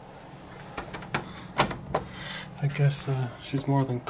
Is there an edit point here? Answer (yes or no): no